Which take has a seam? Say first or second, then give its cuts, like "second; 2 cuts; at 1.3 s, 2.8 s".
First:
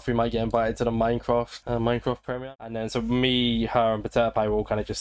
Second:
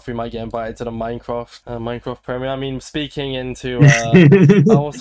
first; 1 cut; at 2.4 s